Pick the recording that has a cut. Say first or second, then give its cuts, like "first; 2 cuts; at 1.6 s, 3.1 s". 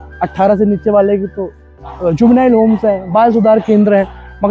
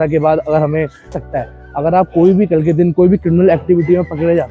second; 1 cut; at 1.2 s